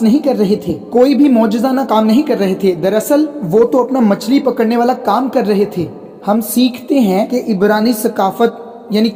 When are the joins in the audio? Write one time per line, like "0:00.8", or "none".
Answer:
none